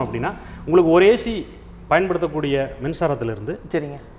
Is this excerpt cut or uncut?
uncut